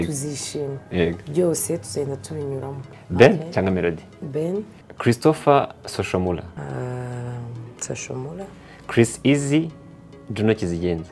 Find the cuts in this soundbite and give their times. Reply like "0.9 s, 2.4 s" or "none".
2.8 s, 4.8 s, 6.5 s